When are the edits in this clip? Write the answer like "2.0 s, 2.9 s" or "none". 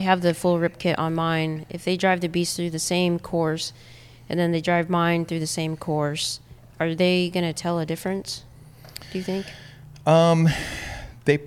none